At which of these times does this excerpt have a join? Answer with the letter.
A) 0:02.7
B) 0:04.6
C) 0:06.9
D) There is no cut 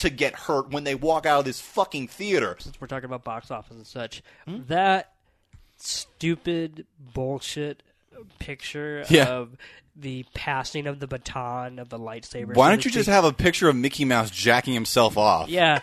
A